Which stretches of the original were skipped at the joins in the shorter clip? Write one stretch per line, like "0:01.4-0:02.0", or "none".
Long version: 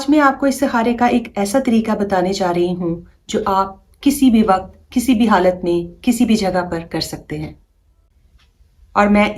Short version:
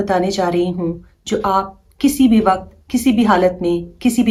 none

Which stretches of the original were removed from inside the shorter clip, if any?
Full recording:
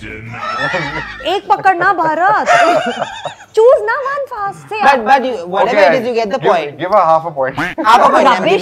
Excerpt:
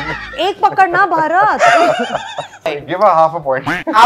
0:03.5-0:06.6

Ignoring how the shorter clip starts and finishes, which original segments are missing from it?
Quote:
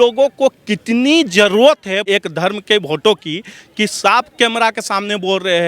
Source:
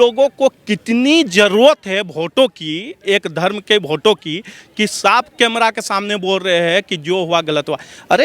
0:02.0-0:03.0

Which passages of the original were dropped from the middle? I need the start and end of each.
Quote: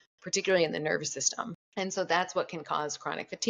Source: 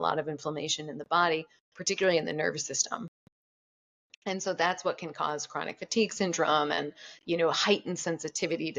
0:03.1-0:04.1

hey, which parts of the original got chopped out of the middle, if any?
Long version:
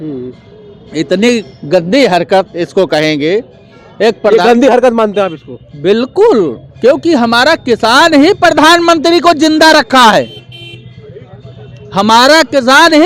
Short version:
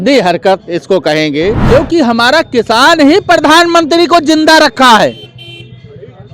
0:03.5-0:06.7

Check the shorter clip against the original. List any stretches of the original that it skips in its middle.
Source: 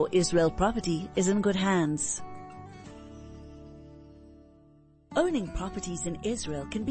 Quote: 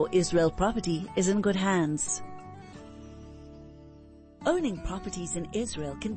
0:02.0-0:02.1
0:04.4-0:05.0

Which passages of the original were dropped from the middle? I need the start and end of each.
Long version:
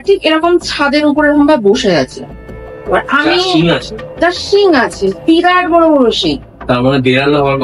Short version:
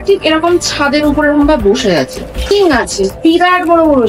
0:02.4-0:04.4

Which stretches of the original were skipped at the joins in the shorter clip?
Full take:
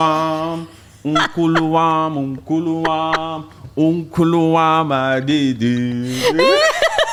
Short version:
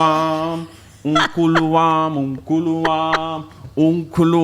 none

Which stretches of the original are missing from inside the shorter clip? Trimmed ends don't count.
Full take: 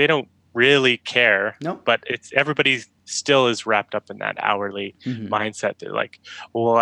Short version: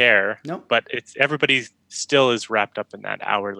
none

